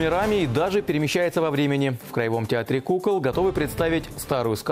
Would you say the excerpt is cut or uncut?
uncut